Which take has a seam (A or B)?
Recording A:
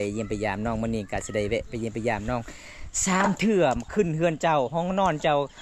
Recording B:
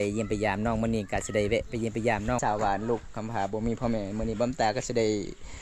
B